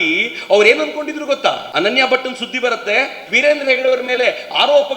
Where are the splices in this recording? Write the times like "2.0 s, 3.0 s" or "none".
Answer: 1.6 s, 3.2 s

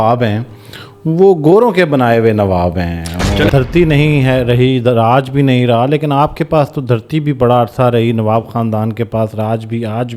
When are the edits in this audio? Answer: 3.5 s

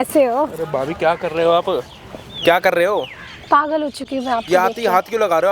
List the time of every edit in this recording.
none

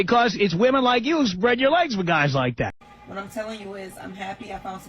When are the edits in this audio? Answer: 2.8 s

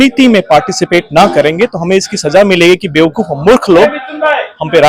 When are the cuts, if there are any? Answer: none

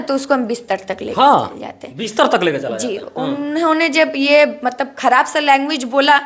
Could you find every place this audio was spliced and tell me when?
none

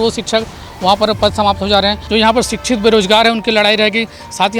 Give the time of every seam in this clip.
2.0 s

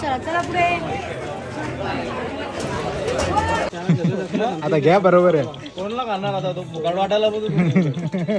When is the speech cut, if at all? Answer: 3.8 s

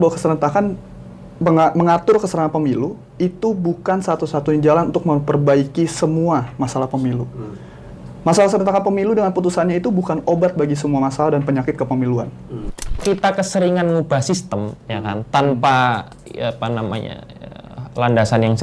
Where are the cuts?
13.0 s

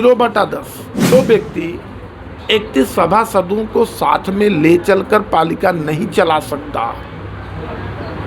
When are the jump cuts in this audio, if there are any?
1.1 s

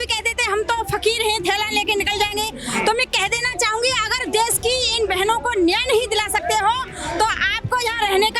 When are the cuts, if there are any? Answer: none

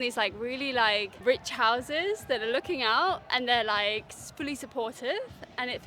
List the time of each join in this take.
1.2 s

